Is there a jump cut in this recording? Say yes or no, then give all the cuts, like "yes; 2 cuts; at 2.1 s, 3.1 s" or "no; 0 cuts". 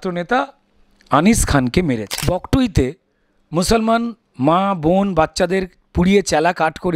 yes; 1 cut; at 2.2 s